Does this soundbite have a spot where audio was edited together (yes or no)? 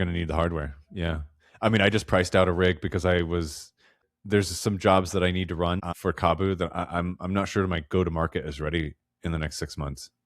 yes